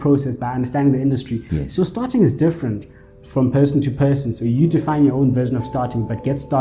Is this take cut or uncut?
cut